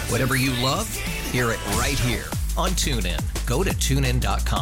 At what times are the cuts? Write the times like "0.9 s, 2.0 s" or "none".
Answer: none